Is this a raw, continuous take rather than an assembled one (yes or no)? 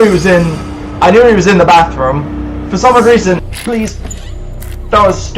no